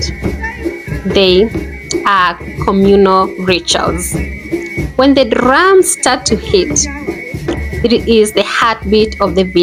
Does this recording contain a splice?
no; 0 cuts

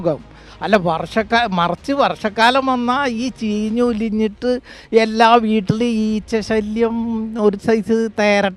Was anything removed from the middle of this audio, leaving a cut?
no; 0 cuts

